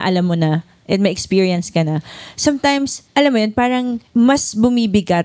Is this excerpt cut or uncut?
cut